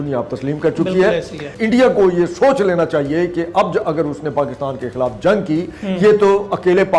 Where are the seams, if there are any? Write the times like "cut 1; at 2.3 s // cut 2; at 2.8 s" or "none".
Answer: cut 1; at 1.5 s